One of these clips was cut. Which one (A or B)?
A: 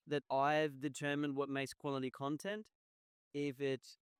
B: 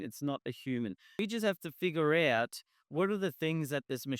B